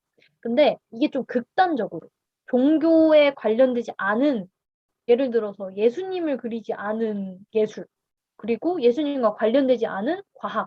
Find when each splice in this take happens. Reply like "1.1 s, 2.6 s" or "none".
4.9 s